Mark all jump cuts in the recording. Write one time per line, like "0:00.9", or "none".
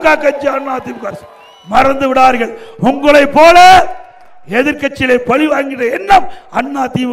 none